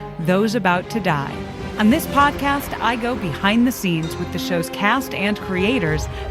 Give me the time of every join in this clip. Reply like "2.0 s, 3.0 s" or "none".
1.6 s